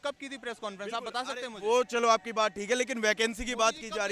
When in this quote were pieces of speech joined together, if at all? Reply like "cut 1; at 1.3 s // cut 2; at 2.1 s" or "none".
none